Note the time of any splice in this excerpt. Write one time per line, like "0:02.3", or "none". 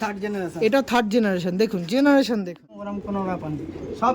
0:02.9